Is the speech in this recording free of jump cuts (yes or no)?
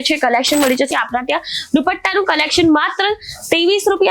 no